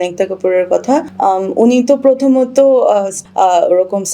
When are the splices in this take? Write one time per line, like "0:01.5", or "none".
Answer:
0:01.1
0:03.1